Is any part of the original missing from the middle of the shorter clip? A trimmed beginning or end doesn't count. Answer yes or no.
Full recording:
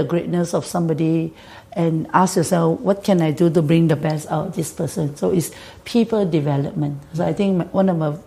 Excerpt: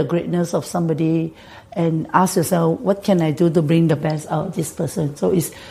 no